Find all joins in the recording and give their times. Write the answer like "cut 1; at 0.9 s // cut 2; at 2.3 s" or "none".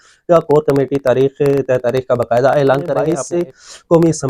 cut 1; at 3.2 s